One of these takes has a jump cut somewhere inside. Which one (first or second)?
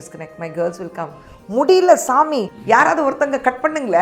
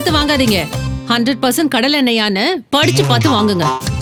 first